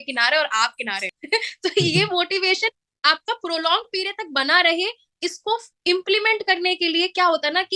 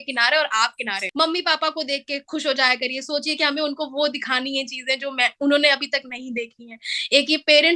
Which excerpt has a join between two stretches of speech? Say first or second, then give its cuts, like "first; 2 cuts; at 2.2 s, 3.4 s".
second; 1 cut; at 1.0 s